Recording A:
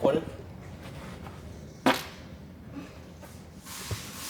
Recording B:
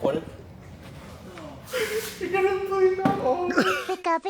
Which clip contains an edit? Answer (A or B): B